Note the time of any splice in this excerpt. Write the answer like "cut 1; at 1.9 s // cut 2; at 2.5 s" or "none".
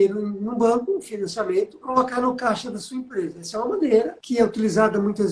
cut 1; at 1.8 s // cut 2; at 4.2 s